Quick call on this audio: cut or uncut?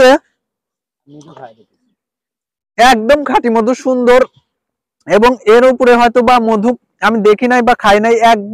uncut